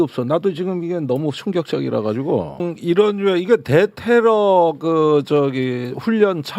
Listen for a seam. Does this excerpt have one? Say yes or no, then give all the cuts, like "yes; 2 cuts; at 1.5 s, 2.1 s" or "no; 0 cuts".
yes; 1 cut; at 2.6 s